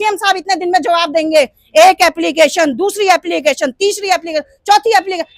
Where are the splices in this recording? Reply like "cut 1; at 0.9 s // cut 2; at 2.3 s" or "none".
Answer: none